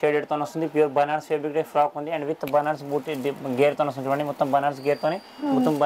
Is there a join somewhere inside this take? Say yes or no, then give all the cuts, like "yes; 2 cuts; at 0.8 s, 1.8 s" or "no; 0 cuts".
no; 0 cuts